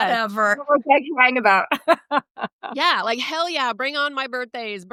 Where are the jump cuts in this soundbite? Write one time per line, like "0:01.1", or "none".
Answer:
none